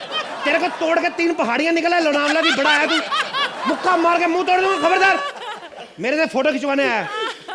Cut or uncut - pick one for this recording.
uncut